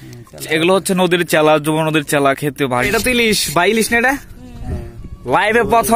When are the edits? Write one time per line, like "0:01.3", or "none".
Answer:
0:02.8